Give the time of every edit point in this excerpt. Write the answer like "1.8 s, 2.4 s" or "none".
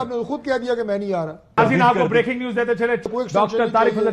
1.6 s, 3.1 s